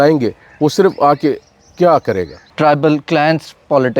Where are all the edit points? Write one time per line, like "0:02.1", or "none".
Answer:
0:02.4

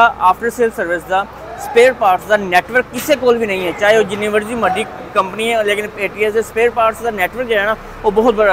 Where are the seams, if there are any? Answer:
none

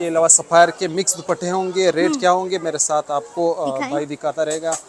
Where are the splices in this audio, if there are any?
none

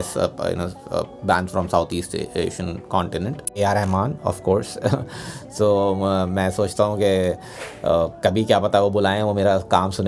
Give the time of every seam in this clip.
0:03.6

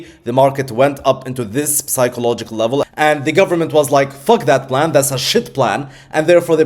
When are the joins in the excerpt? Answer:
0:02.8

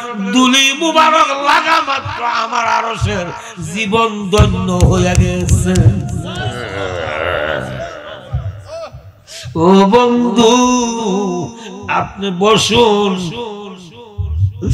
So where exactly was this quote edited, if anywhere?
none

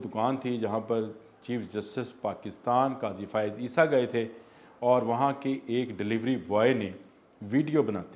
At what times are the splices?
none

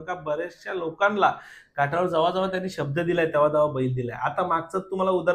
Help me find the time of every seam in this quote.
none

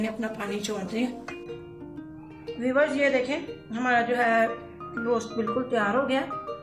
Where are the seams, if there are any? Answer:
0:01.2
0:02.6

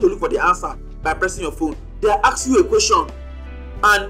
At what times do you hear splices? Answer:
0:01.8

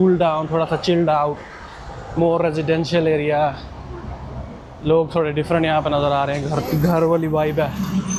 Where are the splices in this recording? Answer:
none

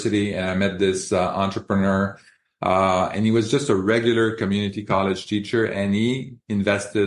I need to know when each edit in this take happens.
none

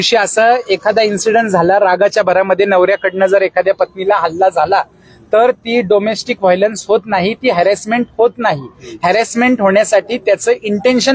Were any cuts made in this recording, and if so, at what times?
none

